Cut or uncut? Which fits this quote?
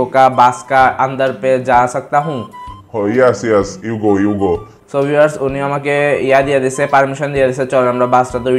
uncut